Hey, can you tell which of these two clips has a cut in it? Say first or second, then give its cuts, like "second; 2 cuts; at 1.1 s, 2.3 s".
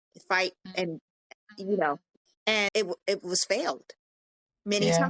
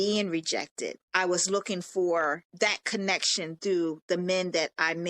second; 2 cuts; at 1.0 s, 2.5 s